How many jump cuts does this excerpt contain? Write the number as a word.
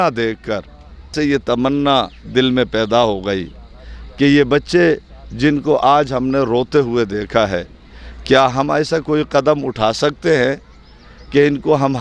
one